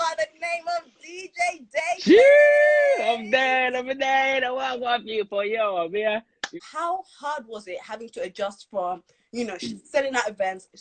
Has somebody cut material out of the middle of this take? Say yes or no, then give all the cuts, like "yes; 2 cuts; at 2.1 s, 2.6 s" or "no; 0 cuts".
yes; 1 cut; at 6.5 s